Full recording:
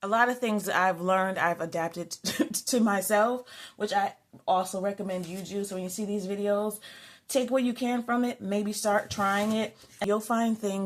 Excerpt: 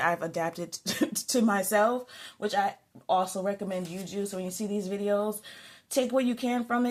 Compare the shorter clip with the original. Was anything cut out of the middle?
no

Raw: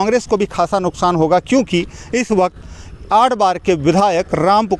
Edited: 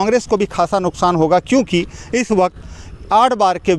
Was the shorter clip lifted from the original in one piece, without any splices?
yes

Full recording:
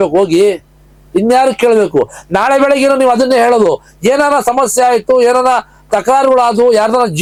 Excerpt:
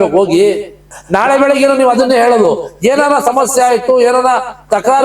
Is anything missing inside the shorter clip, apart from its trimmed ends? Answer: yes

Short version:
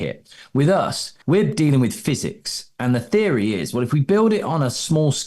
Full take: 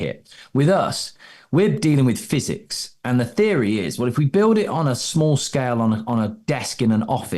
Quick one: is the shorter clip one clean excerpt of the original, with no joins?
no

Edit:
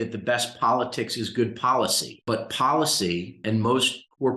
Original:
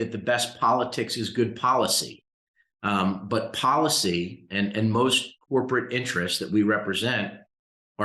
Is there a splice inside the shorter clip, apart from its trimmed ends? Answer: yes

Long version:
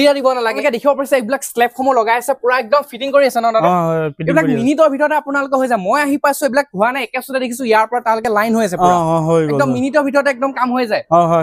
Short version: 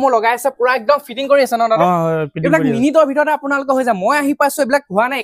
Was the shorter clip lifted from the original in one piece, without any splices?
yes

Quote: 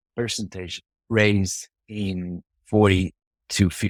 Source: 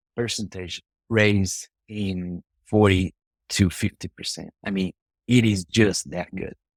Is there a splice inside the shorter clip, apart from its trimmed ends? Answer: no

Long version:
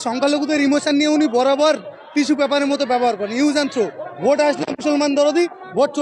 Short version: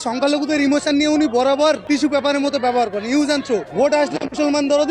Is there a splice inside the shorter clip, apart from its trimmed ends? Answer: yes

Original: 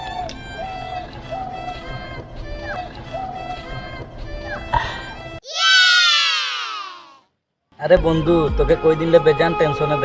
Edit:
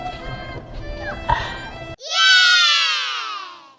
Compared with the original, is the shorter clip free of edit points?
no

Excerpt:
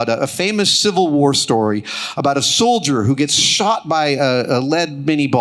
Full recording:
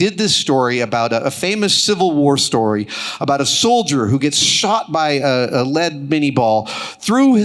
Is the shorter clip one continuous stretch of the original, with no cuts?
yes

